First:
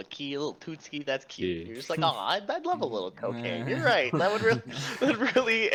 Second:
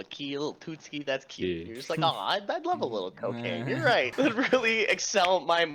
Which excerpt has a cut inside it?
second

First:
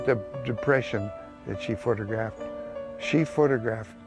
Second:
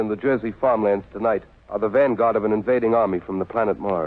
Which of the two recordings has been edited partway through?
second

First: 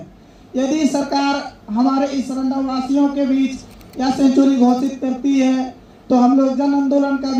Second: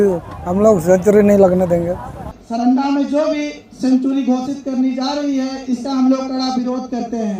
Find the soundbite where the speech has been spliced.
second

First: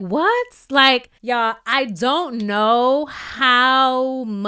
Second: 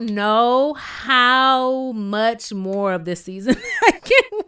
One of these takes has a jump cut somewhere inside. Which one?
first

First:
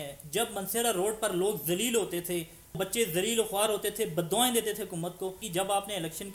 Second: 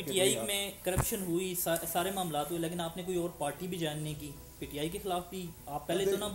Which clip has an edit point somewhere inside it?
first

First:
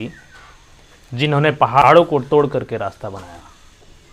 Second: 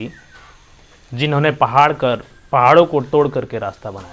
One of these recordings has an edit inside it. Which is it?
first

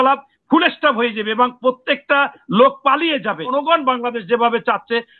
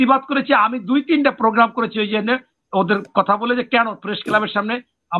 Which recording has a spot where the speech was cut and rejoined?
first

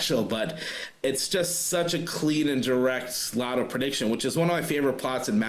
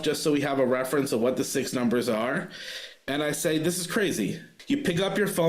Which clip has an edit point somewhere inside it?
second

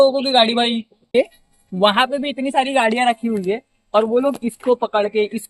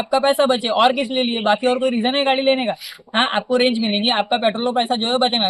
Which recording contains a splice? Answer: first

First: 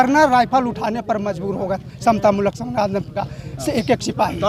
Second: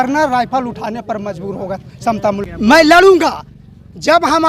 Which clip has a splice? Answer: second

